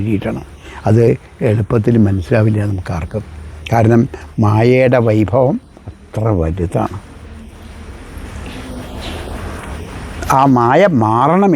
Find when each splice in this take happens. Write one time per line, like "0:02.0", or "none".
none